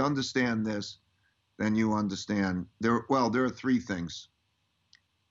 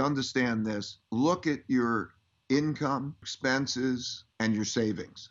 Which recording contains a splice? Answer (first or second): second